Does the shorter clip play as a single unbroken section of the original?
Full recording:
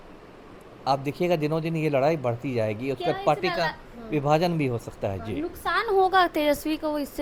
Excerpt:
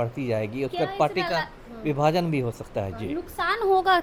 yes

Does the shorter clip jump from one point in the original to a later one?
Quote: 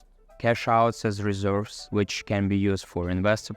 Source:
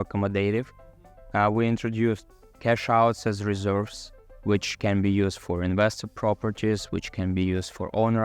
yes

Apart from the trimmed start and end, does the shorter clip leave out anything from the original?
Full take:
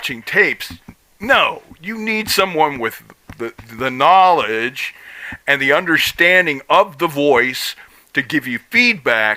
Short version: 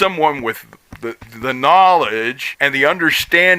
yes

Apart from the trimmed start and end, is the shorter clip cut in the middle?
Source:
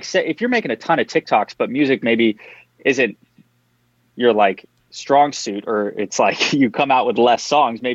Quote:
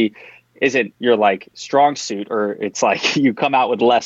yes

